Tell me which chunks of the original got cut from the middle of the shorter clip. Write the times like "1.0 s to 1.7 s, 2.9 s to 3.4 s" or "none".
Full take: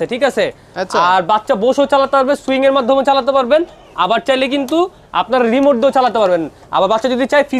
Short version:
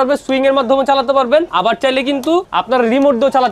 3.7 s to 3.9 s, 4.9 s to 5.1 s